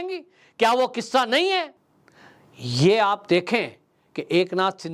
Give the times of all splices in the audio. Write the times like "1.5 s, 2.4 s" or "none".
1.8 s